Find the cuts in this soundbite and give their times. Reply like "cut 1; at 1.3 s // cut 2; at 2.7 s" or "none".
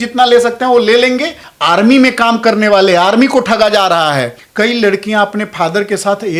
cut 1; at 1.4 s // cut 2; at 4.4 s